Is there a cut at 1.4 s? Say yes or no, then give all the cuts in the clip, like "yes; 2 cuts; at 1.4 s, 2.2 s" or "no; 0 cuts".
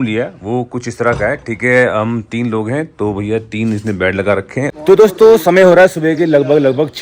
no; 1 cut; at 4.7 s